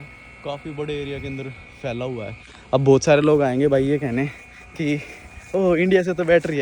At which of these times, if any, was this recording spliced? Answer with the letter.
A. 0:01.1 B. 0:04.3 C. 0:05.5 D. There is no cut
D